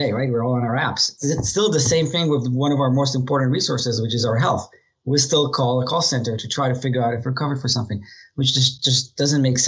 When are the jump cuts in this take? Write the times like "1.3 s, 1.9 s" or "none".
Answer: 1.1 s